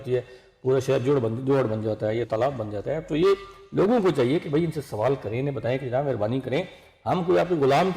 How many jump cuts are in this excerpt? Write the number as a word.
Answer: zero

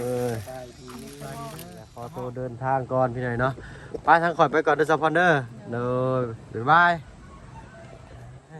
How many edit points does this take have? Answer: one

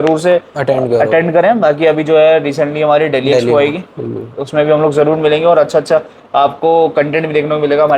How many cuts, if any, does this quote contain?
zero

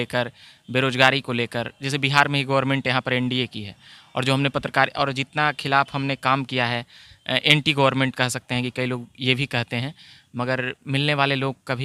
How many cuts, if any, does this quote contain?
zero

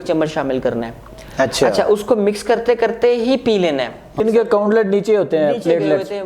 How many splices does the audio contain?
one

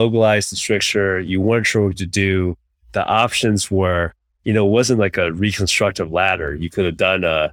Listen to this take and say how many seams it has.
zero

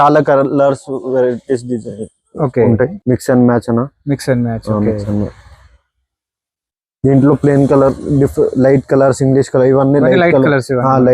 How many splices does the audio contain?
one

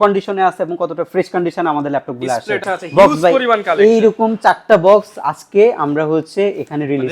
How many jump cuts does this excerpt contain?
one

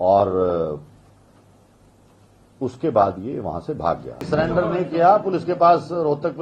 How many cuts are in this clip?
one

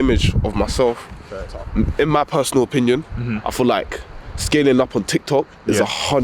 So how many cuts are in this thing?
one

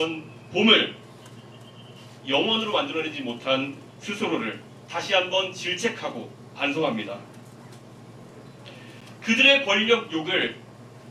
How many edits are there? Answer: zero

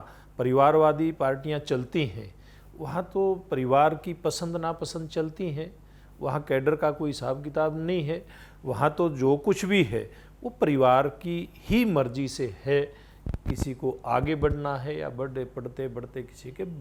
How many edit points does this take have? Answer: zero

